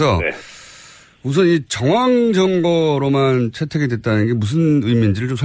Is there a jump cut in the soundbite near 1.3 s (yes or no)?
no